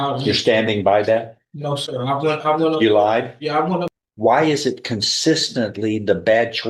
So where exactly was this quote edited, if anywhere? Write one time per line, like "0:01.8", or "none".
0:03.9